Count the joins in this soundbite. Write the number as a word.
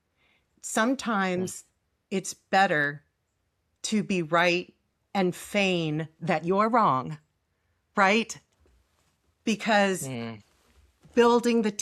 zero